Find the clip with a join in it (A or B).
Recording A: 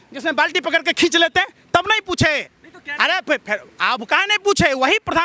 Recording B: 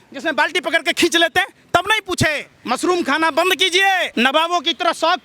B